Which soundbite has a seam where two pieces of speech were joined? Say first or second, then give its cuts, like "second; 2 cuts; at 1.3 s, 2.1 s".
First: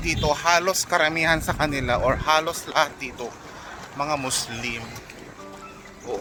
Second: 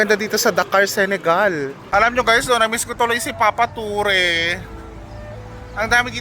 second; 1 cut; at 1.8 s